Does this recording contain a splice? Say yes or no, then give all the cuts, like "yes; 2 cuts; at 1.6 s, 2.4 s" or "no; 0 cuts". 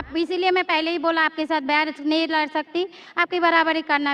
no; 0 cuts